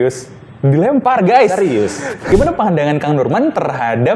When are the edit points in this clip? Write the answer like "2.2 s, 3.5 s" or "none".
2.3 s